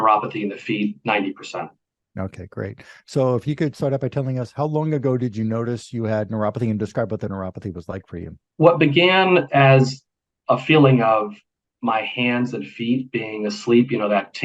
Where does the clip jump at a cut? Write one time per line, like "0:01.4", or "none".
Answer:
none

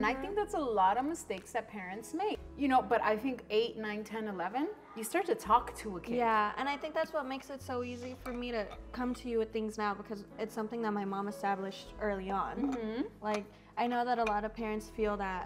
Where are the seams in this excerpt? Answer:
0:02.5

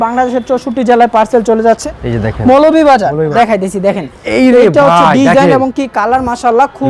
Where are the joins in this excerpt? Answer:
0:01.8
0:03.3

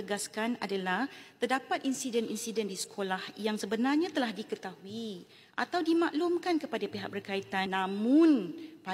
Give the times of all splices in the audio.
0:07.7

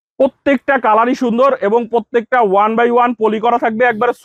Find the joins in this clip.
none

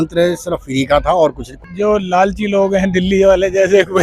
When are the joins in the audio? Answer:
0:01.5

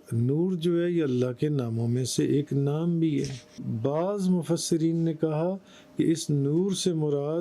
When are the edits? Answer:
0:03.6

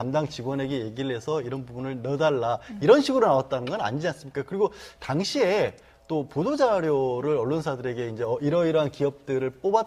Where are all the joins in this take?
0:01.0

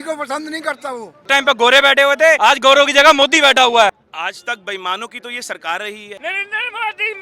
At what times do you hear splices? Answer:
0:01.2
0:02.4
0:04.1
0:06.1

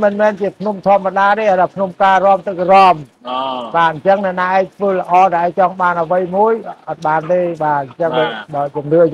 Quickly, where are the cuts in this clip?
none

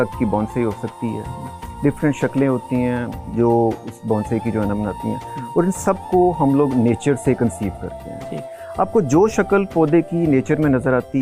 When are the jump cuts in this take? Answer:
none

